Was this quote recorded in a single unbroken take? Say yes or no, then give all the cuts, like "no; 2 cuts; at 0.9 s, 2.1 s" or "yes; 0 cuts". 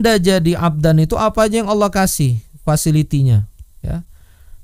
yes; 0 cuts